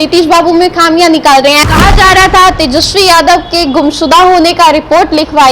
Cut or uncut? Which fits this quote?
cut